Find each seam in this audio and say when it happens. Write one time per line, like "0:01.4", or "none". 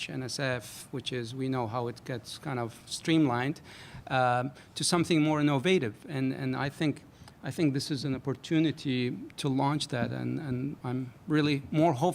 0:11.0